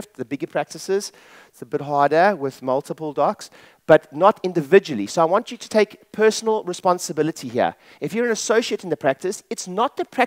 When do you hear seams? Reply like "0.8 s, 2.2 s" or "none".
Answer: none